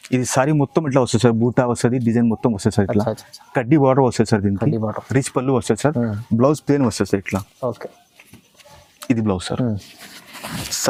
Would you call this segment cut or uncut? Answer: uncut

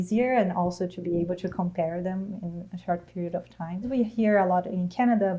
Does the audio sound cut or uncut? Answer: cut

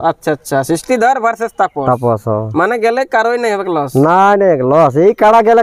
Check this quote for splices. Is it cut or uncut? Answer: uncut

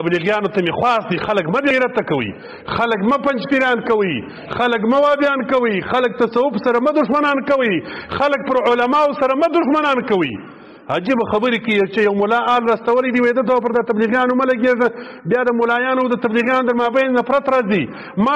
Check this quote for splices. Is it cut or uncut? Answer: cut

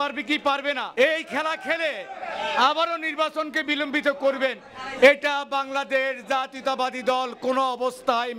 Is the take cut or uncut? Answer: cut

